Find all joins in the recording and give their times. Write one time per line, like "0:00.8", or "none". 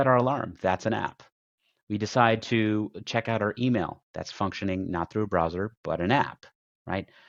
none